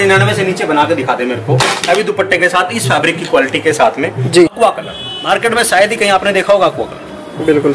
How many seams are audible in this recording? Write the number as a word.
one